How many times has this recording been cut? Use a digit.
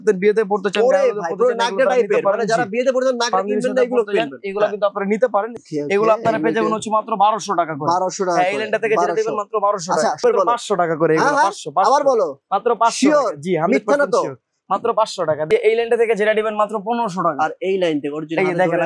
3